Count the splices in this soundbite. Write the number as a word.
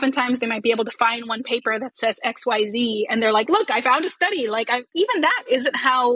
one